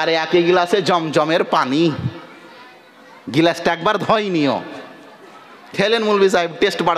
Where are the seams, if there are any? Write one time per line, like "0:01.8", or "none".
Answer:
none